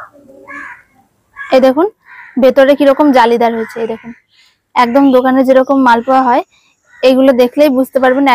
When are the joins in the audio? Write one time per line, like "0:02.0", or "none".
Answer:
none